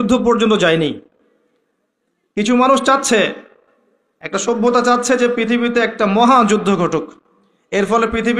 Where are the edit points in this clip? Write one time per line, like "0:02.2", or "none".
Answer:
none